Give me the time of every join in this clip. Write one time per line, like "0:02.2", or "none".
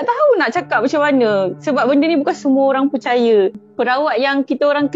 0:03.6